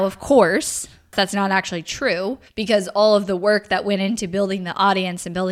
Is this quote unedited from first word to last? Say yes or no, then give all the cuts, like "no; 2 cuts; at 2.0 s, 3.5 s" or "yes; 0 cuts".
no; 2 cuts; at 1.1 s, 2.5 s